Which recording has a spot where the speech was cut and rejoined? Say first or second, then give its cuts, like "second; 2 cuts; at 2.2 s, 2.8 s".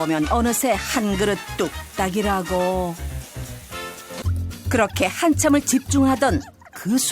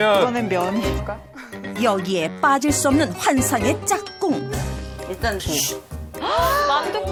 first; 1 cut; at 4.2 s